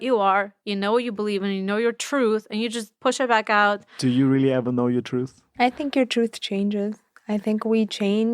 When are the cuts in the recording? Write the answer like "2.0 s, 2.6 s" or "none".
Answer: 2.9 s, 5.4 s